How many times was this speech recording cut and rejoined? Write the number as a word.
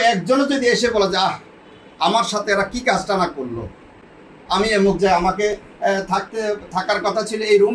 zero